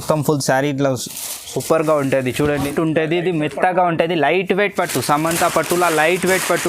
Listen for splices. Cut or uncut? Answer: cut